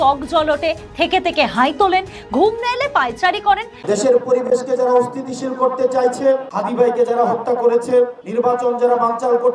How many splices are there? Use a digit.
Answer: 1